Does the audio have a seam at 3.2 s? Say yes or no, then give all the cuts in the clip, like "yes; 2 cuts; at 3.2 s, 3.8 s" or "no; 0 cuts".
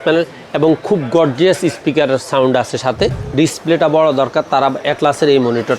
yes; 1 cut; at 3.2 s